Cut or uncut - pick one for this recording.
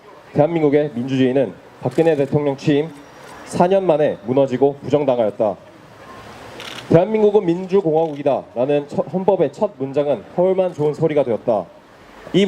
cut